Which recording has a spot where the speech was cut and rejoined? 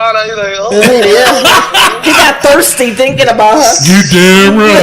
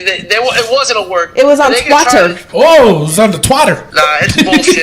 second; 2 cuts; at 2.4 s, 3.9 s

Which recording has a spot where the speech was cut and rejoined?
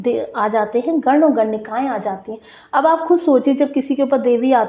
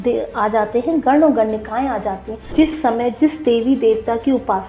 second; 1 cut; at 2.4 s

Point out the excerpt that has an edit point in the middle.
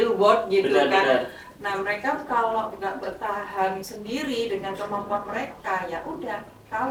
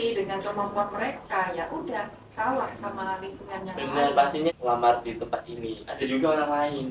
second; 1 cut; at 4.5 s

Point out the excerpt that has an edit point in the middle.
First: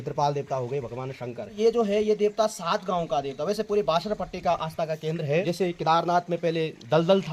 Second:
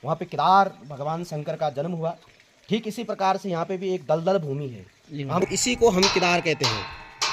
first; 2 cuts; at 1.6 s, 5.5 s

